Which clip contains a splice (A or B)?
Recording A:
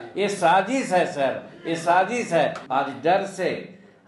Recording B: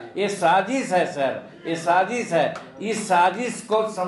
A